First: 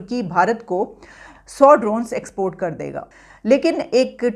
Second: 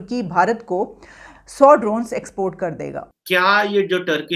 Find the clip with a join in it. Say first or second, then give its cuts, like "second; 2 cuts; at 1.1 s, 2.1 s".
second; 1 cut; at 3.2 s